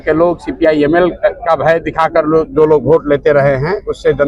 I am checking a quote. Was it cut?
no; 0 cuts

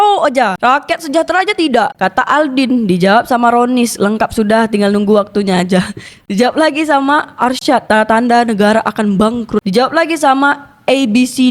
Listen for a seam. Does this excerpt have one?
no; 0 cuts

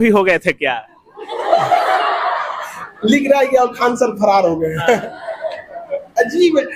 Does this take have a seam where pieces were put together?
no; 0 cuts

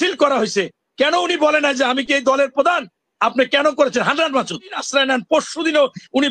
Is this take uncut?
no; 1 cut; at 4.8 s

